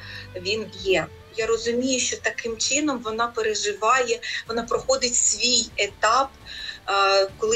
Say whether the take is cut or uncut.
cut